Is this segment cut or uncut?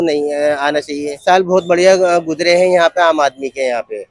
cut